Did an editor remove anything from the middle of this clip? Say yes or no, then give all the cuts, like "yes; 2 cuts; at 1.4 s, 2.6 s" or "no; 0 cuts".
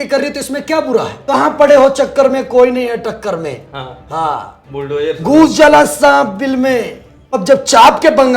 yes; 2 cuts; at 1.2 s, 7.4 s